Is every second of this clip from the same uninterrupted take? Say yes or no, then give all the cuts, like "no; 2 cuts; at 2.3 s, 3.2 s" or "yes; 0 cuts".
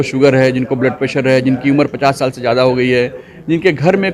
yes; 0 cuts